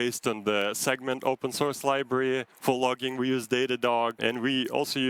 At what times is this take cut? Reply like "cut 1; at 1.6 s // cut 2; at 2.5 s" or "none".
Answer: cut 1; at 2.5 s // cut 2; at 4.2 s